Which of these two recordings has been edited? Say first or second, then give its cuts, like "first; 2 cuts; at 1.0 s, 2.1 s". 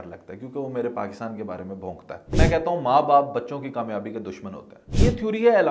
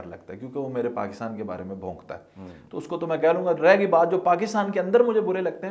first; 2 cuts; at 2.3 s, 4.8 s